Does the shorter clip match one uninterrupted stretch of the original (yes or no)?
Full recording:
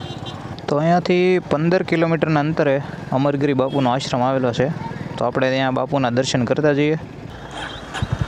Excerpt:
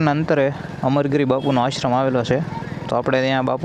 yes